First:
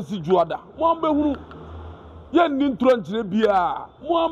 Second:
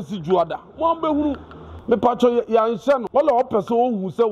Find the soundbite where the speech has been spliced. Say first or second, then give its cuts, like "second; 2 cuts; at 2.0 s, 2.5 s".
second; 2 cuts; at 1.7 s, 3.1 s